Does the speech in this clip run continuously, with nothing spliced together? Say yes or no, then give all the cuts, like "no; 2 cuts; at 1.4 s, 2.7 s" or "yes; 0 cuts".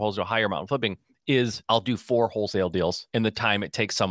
no; 2 cuts; at 1.6 s, 3.0 s